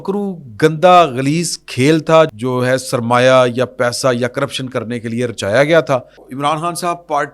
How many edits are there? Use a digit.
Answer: 2